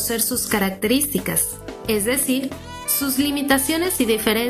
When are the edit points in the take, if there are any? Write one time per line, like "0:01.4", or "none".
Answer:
none